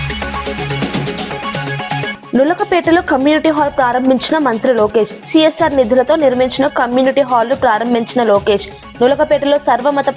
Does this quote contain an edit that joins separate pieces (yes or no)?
yes